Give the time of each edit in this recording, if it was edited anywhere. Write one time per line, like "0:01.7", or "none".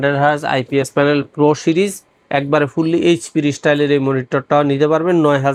none